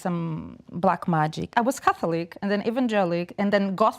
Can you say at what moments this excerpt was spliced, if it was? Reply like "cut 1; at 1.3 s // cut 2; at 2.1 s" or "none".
cut 1; at 1.5 s